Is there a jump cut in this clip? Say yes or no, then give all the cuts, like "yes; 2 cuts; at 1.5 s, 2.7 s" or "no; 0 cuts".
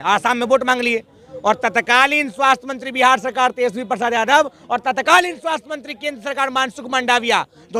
no; 0 cuts